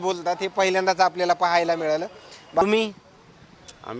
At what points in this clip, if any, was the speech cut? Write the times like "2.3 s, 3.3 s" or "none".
2.6 s

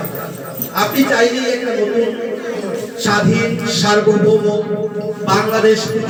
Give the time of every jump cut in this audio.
none

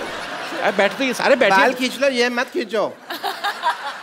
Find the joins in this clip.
none

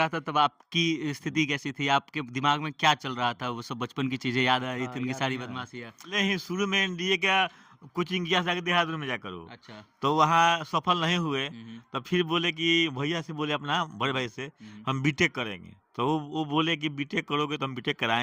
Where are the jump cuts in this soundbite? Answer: 6.1 s

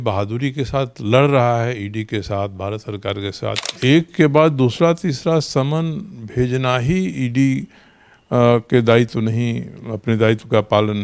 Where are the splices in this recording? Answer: 3.7 s

